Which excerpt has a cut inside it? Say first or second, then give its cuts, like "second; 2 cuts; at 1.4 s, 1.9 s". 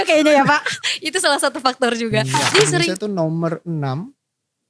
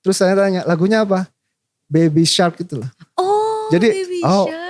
first; 1 cut; at 2.9 s